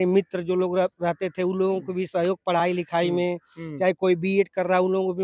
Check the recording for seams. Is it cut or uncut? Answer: uncut